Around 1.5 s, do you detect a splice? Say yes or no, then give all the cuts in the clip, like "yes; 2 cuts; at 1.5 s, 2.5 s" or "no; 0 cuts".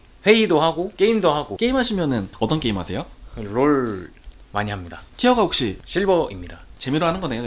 yes; 2 cuts; at 1.5 s, 5.8 s